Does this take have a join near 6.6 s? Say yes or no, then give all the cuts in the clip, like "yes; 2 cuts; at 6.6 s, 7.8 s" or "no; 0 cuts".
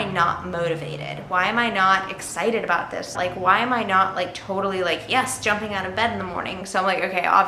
yes; 2 cuts; at 3.1 s, 6.6 s